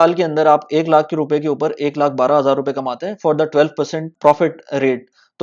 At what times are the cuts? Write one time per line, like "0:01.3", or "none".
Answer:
0:04.1